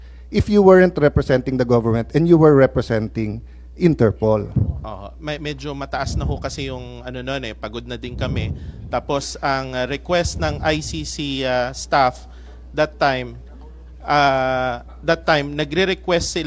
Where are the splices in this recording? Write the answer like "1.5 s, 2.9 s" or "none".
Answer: none